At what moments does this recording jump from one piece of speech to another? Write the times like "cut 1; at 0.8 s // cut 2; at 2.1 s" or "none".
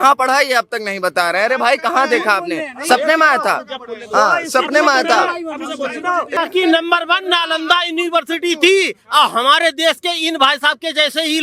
cut 1; at 6.4 s